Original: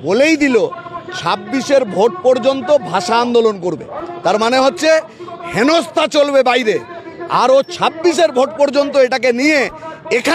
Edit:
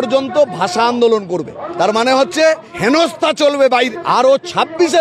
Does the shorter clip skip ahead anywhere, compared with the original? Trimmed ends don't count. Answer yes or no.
yes